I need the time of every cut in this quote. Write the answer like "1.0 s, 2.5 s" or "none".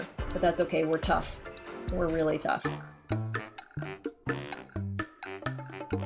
2.6 s